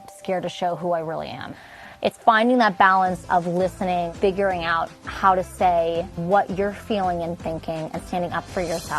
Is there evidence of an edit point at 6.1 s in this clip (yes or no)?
yes